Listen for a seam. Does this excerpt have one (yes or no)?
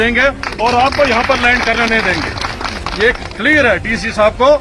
no